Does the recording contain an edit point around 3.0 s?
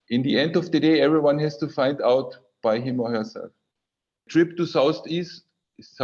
no; 1 cut; at 4.3 s

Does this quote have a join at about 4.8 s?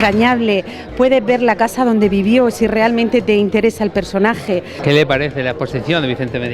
yes; 1 cut; at 4.8 s

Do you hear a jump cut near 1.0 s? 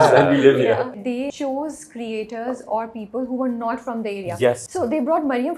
yes; 2 cuts; at 1.0 s, 4.6 s

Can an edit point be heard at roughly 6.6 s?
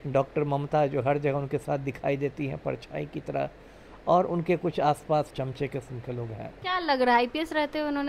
yes; 2 cuts; at 5.3 s, 6.6 s

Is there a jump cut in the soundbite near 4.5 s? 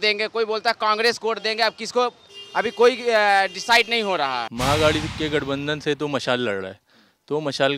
yes; 1 cut; at 4.5 s

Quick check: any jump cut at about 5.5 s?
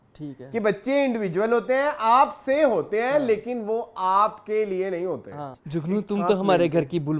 yes; 1 cut; at 5.5 s

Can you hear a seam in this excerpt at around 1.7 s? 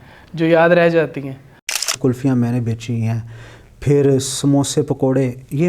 yes; 1 cut; at 1.7 s

